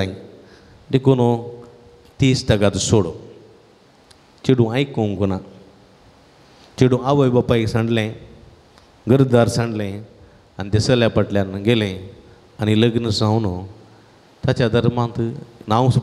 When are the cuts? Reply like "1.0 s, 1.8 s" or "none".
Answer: none